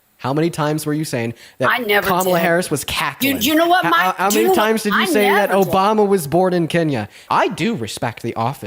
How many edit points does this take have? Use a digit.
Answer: 1